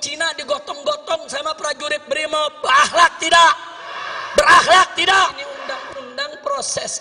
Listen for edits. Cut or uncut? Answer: cut